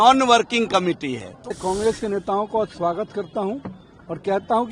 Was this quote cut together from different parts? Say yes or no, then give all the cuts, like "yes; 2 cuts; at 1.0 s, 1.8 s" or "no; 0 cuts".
yes; 1 cut; at 1.5 s